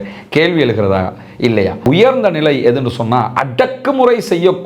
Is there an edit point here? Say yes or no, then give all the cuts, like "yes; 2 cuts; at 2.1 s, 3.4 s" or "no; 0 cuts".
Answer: yes; 1 cut; at 1.8 s